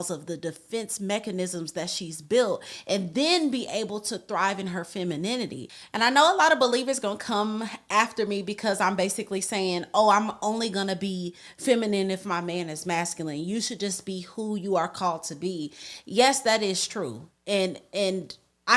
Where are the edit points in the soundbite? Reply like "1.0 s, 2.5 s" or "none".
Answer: none